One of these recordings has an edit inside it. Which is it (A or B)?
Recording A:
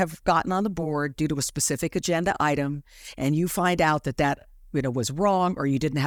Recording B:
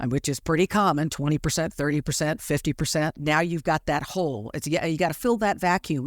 B